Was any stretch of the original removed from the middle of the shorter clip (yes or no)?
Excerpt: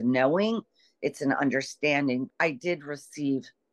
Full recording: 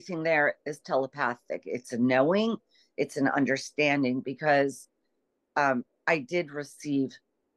yes